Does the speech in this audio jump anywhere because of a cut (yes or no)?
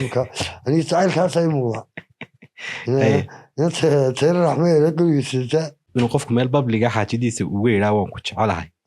yes